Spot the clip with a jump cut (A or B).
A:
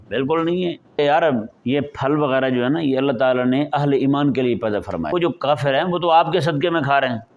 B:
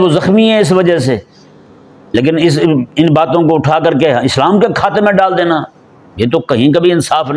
A